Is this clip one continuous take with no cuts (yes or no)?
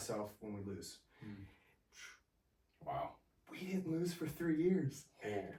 yes